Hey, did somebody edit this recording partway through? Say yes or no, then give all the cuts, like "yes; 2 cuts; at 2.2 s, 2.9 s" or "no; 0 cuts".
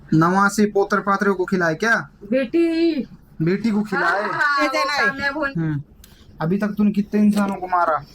yes; 1 cut; at 5.5 s